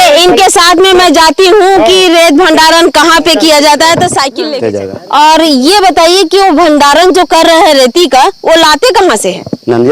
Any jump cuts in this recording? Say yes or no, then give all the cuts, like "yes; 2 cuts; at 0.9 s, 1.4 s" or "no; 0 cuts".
yes; 1 cut; at 4.4 s